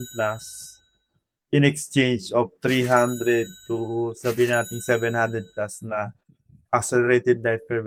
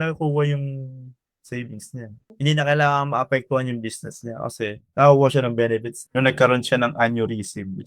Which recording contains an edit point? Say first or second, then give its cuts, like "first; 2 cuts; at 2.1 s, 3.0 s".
second; 3 cuts; at 2.2 s, 4.8 s, 6.0 s